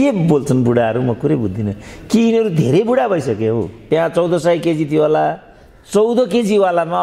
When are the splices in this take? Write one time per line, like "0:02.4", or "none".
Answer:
0:03.8

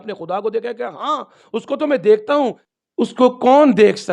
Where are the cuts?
0:02.6

